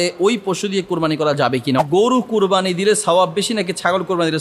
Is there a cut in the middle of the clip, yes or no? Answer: yes